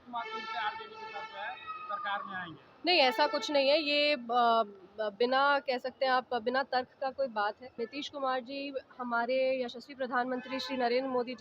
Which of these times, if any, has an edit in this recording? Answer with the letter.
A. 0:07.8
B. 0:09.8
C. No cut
A